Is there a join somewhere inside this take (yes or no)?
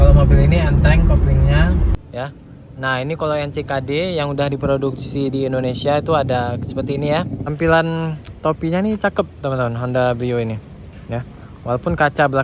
yes